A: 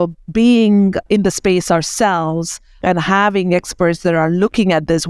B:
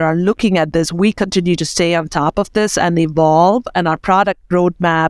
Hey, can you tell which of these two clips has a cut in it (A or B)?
A